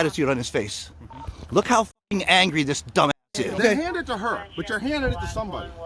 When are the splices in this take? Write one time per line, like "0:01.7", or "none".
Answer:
0:03.3